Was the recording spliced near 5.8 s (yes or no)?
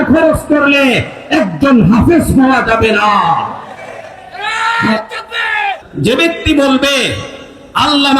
yes